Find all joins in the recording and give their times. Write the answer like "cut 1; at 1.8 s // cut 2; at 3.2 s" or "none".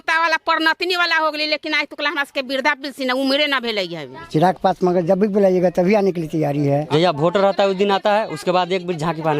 cut 1; at 4.2 s // cut 2; at 6.9 s